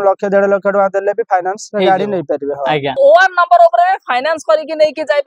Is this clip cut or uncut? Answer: cut